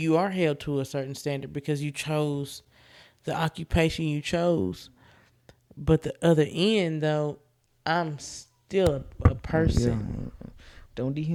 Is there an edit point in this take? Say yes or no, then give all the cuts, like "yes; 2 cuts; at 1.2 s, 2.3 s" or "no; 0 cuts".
no; 0 cuts